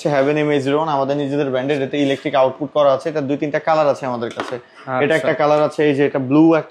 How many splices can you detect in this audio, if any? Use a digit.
0